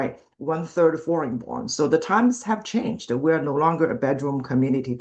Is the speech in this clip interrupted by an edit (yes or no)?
no